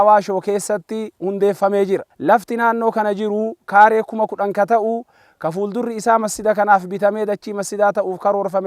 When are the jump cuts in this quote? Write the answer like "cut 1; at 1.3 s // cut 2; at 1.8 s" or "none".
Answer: cut 1; at 2.1 s